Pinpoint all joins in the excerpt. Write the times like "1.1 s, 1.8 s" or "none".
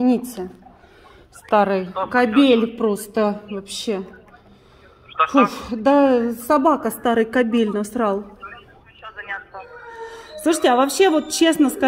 9.3 s